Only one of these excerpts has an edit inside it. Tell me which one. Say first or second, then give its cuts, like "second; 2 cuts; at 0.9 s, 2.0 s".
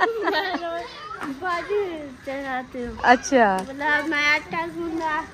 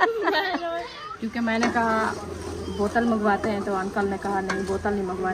second; 1 cut; at 1.0 s